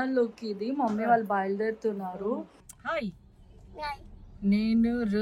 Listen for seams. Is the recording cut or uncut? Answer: cut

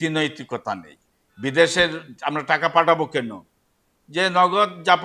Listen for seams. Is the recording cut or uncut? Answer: cut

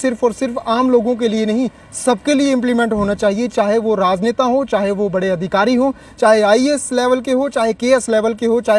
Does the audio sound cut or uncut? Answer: uncut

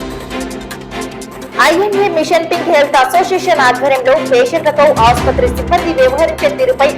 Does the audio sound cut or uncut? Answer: cut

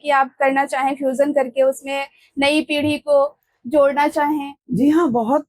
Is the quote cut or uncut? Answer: cut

